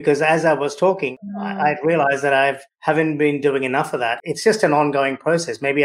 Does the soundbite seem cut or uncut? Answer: cut